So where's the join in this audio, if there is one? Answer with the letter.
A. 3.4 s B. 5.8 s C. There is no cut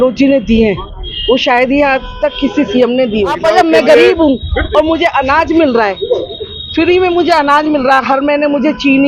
A